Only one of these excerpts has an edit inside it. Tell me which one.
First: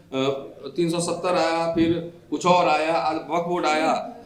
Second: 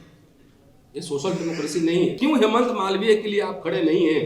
second; 1 cut; at 2.2 s

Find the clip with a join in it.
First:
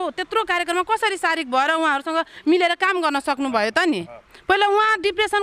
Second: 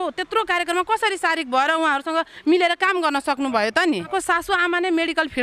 second; 1 cut; at 4.1 s

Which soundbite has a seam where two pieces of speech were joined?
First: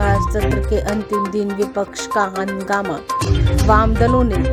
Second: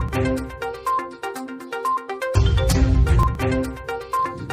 second; 1 cut; at 1.0 s

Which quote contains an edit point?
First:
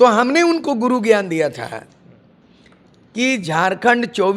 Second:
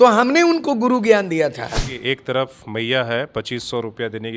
second; 1 cut; at 1.9 s

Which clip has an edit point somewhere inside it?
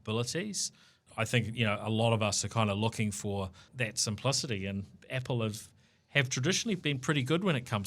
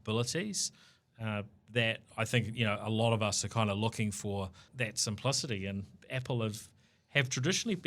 first; 1 cut; at 1.1 s

